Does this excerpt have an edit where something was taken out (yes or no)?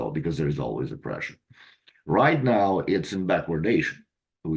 no